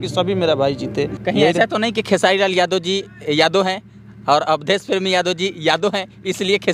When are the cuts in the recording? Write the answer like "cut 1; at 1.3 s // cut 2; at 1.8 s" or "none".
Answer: cut 1; at 1.2 s